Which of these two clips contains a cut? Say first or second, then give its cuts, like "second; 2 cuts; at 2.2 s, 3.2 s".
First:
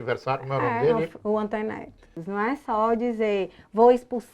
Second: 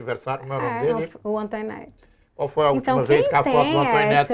first; 1 cut; at 2.2 s